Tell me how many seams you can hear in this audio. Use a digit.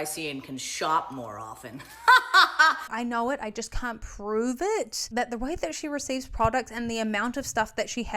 1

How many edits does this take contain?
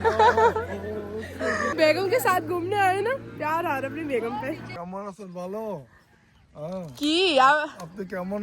2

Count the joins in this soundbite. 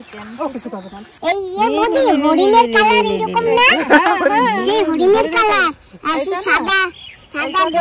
1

